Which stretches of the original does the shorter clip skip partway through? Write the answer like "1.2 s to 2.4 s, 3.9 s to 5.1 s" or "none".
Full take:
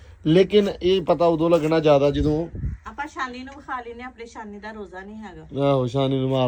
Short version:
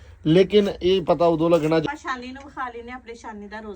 1.8 s to 2.9 s